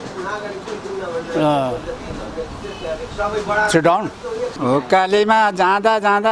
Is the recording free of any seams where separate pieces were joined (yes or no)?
no